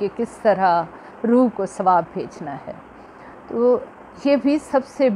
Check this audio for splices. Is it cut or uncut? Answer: uncut